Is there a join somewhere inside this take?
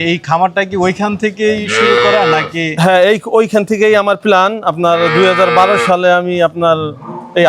no; 0 cuts

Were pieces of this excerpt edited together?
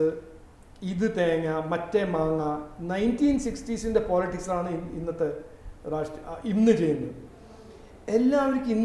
no; 0 cuts

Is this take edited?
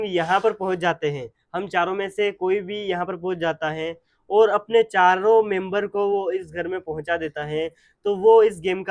no; 0 cuts

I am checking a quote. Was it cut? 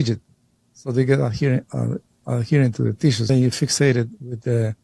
yes; 1 cut; at 3.2 s

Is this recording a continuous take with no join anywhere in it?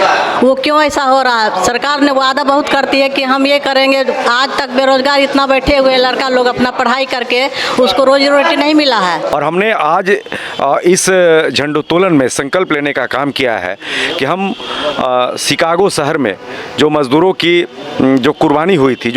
no; 1 cut; at 9.3 s

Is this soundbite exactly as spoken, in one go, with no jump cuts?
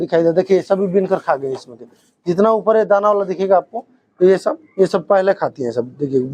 yes; 0 cuts

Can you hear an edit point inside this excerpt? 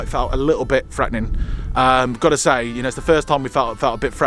no; 0 cuts

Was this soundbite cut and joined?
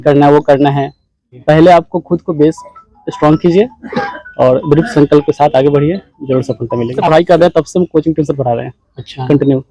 yes; 2 cuts; at 1.4 s, 7.0 s

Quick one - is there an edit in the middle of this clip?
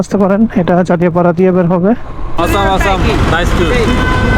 yes; 1 cut; at 2.4 s

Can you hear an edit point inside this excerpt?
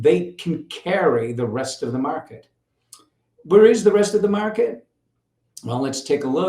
no; 0 cuts

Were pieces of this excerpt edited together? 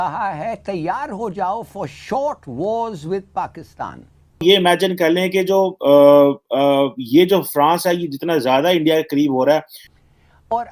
yes; 2 cuts; at 4.4 s, 9.8 s

